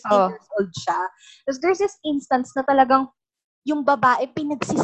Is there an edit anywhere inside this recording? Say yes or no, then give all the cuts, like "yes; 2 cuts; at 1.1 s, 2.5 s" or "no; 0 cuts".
no; 0 cuts